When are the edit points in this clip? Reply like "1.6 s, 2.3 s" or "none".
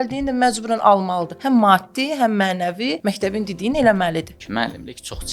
1.3 s, 2.9 s, 4.4 s